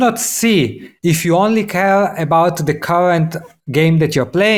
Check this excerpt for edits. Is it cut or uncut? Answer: uncut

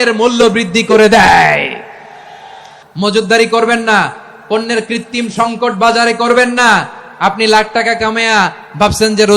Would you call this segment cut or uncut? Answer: cut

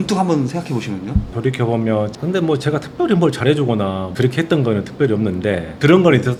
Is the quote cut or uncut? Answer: uncut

